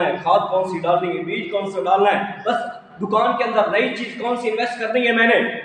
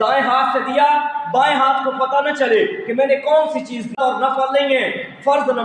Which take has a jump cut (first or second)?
second